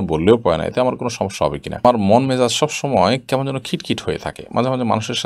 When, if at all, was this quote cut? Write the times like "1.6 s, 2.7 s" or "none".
1.8 s